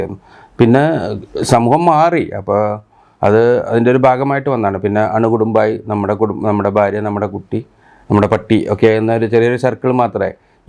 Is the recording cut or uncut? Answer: uncut